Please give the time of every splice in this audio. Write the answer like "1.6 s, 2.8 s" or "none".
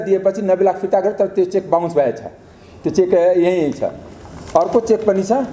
none